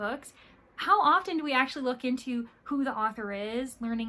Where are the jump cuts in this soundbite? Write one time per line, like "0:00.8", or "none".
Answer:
none